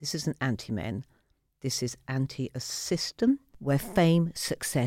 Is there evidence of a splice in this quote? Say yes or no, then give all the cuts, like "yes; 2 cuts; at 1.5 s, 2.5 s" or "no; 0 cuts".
yes; 1 cut; at 3.5 s